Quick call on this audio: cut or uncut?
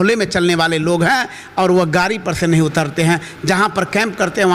uncut